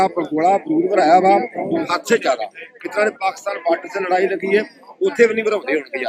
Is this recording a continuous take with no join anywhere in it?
yes; 0 cuts

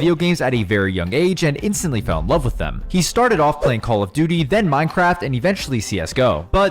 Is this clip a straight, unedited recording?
no; 1 cut; at 5.7 s

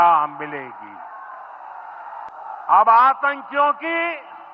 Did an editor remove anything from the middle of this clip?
yes; 1 cut; at 2.3 s

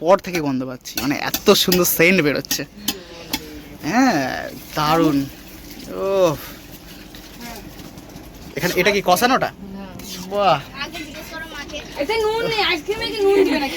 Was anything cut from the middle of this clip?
no; 0 cuts

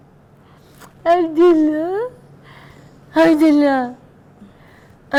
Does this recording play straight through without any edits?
yes; 0 cuts

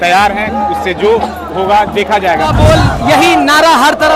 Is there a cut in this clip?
yes; 1 cut; at 2.5 s

